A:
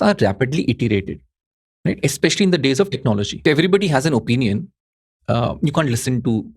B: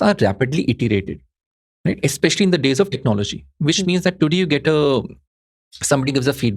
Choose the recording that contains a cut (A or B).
A